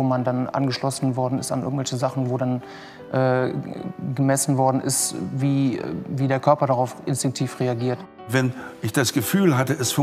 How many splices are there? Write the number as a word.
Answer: one